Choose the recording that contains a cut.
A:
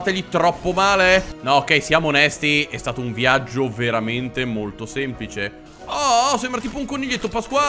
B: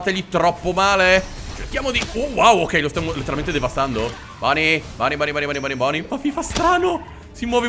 A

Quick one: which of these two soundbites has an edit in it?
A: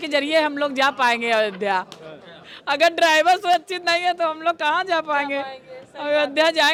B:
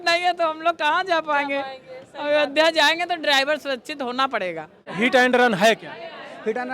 B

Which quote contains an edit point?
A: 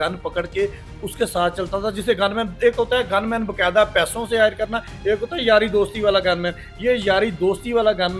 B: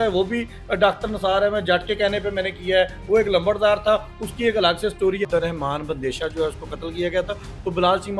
B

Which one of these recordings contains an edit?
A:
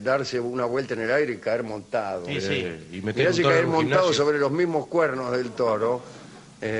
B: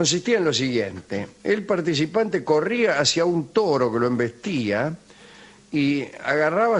A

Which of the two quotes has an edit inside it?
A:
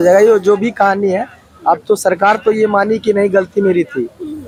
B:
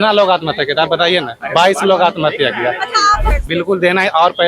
B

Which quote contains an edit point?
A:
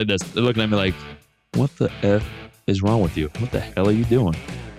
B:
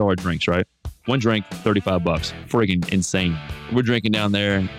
B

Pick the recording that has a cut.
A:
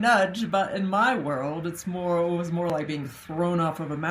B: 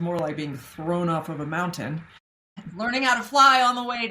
B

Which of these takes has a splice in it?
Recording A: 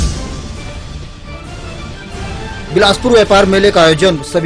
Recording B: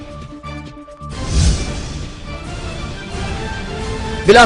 B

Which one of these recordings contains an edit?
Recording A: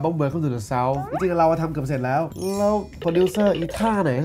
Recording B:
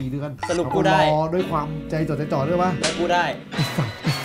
A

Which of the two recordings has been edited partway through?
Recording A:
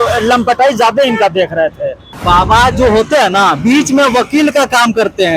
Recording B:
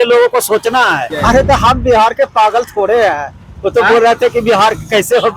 B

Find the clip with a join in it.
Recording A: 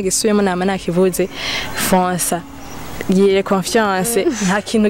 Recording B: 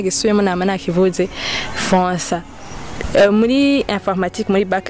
B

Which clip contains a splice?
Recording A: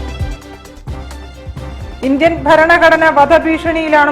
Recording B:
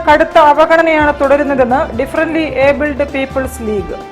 A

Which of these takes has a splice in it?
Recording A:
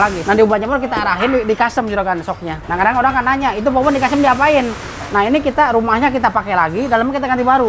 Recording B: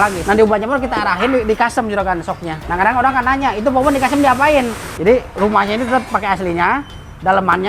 B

